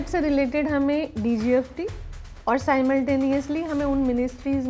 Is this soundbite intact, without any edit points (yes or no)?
yes